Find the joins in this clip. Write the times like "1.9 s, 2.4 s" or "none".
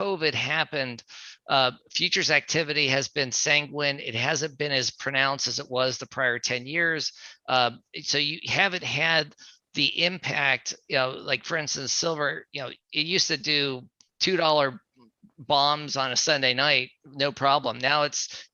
none